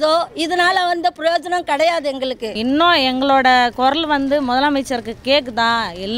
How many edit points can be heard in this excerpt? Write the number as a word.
one